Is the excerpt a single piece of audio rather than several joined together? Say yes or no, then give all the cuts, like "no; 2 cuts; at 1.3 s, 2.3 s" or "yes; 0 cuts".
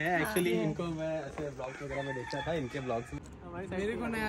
no; 1 cut; at 3.2 s